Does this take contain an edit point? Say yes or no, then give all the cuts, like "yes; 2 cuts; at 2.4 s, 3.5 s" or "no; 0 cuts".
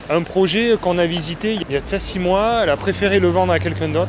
no; 0 cuts